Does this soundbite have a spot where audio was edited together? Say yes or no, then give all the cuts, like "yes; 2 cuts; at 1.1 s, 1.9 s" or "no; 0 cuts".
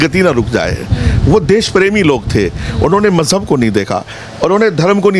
no; 0 cuts